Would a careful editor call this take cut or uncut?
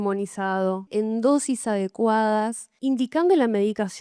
cut